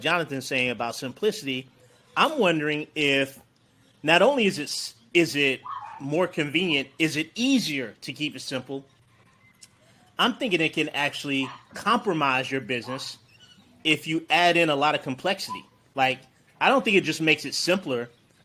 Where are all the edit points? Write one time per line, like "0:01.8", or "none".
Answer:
none

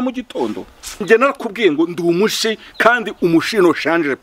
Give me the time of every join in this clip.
0:01.0

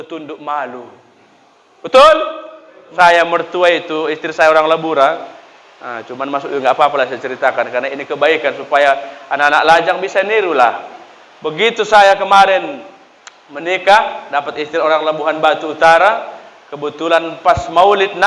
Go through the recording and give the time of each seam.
0:02.8

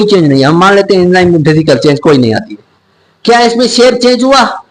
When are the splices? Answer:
none

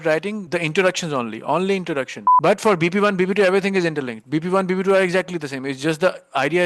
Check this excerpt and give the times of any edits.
0:02.2

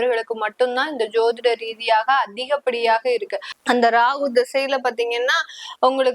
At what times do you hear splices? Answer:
0:03.5

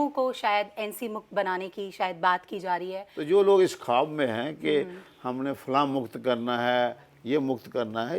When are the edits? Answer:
0:03.1

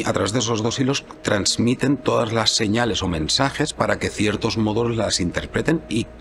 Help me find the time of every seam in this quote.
none

